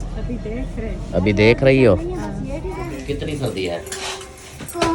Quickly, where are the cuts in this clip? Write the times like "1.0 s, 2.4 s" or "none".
3.0 s

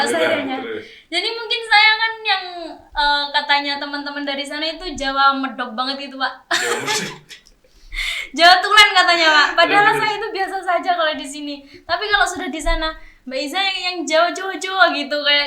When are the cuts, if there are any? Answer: none

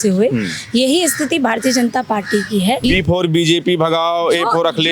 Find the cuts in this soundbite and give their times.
2.8 s

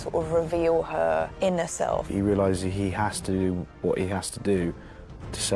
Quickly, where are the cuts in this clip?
1.6 s

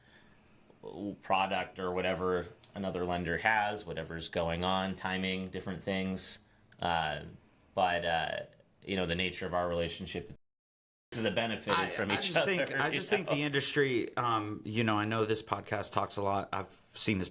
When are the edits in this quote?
10.8 s

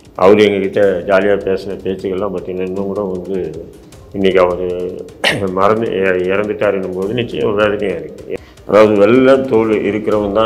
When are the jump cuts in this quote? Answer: 8.2 s

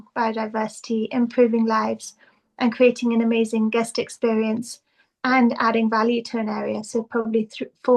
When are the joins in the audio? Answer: none

